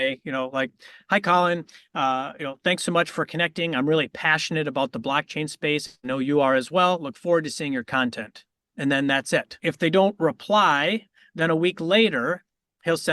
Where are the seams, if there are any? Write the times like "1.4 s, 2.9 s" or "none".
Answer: 9.5 s